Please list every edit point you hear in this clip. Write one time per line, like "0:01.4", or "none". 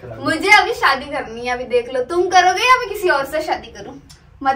0:03.7